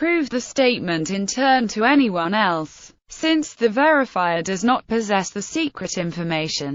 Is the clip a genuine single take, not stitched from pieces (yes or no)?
no